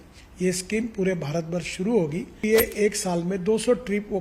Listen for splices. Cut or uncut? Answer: cut